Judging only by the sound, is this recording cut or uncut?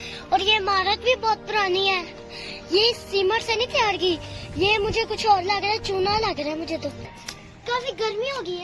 cut